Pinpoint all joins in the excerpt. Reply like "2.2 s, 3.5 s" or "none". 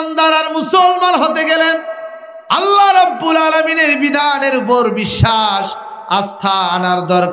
none